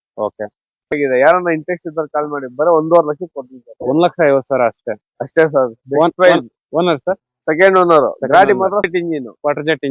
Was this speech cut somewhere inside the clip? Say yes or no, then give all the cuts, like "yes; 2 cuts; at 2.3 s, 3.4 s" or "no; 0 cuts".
yes; 2 cuts; at 0.9 s, 8.9 s